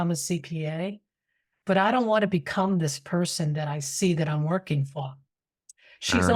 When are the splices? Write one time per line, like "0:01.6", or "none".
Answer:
none